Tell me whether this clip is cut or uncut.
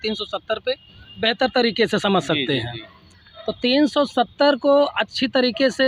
uncut